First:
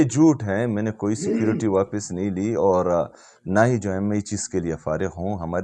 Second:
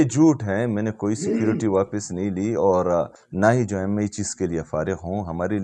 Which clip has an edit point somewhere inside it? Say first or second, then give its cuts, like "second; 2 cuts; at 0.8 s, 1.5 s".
second; 1 cut; at 3.2 s